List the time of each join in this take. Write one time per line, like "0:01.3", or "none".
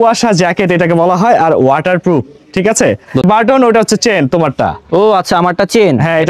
0:03.2